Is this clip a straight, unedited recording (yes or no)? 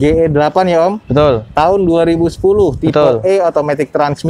yes